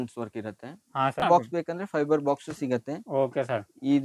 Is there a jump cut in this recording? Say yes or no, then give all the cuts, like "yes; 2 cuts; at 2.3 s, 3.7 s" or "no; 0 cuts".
yes; 1 cut; at 1.2 s